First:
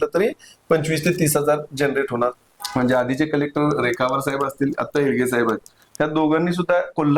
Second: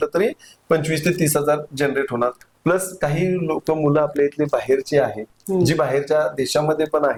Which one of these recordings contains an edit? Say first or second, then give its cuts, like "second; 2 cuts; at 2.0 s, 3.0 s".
first; 1 cut; at 2.5 s